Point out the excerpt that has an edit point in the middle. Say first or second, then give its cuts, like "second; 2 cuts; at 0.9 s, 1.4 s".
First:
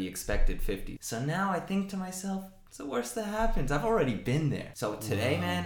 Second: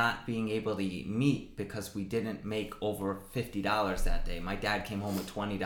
first; 2 cuts; at 0.9 s, 4.7 s